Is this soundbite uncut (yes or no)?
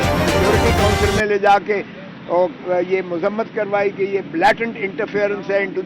no